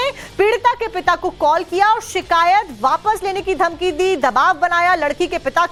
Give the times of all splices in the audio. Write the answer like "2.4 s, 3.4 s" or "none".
none